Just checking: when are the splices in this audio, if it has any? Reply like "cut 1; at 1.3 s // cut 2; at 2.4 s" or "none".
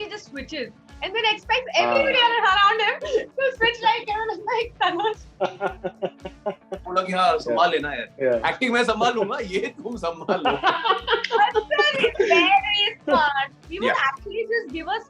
cut 1; at 6.8 s // cut 2; at 13.6 s